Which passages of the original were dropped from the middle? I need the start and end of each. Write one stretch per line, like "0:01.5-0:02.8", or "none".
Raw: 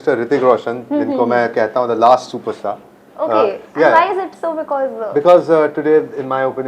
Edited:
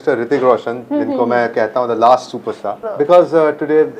0:02.8-0:05.0